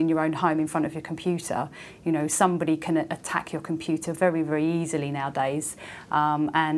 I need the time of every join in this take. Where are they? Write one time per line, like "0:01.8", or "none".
none

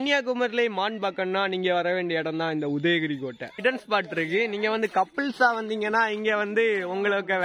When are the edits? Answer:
0:03.6

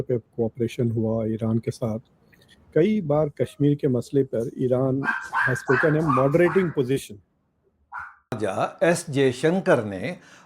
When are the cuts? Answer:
0:08.4

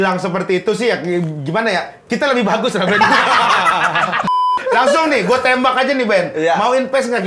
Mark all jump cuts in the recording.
0:04.6

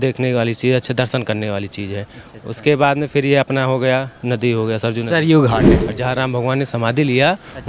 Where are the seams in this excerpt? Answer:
0:05.9

